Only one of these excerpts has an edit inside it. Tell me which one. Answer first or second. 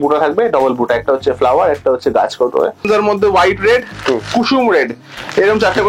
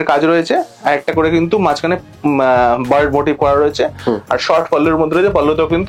first